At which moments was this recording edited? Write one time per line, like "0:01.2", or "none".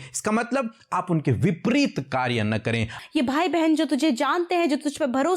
0:02.9